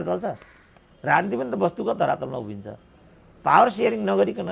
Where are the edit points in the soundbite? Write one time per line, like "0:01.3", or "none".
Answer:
none

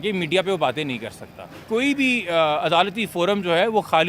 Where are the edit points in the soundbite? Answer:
0:01.5

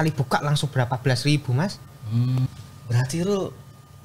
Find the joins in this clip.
0:02.5

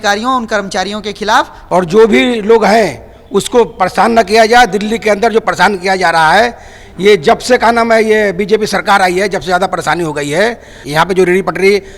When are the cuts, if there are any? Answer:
0:01.6
0:10.7

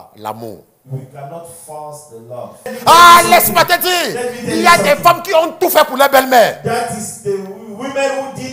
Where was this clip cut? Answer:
0:02.6

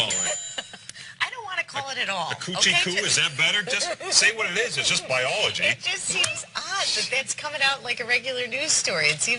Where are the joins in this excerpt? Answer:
0:03.8

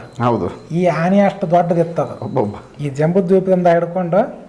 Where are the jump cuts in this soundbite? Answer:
0:02.7

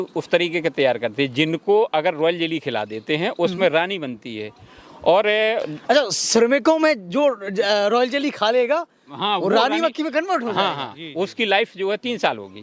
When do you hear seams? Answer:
none

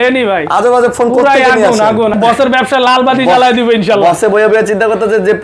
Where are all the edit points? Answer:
0:02.1

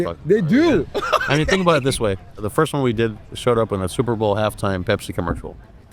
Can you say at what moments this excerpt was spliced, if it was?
0:02.4

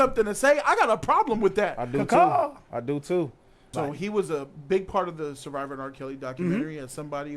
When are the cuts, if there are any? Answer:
0:03.7

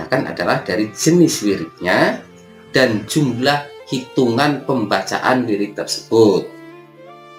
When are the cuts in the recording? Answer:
none

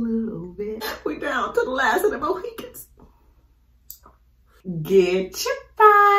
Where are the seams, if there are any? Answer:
0:00.9
0:04.5

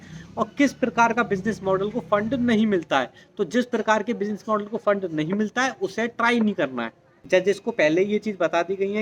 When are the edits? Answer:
0:07.2

